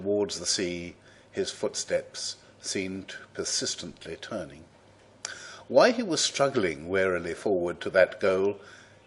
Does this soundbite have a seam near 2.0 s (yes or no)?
no